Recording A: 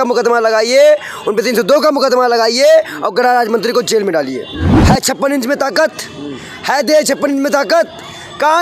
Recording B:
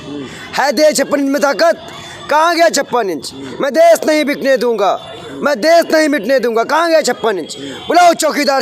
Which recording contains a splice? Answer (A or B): A